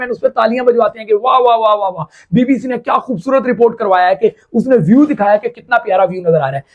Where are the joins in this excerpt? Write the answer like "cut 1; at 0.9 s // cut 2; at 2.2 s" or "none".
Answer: none